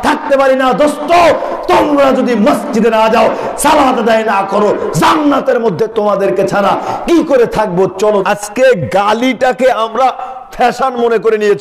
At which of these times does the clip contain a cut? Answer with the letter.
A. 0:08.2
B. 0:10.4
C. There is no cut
A